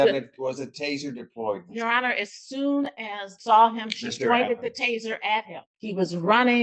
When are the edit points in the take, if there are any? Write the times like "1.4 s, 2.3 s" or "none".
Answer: 3.3 s, 5.7 s